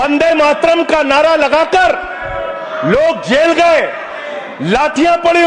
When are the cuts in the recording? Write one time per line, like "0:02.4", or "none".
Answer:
none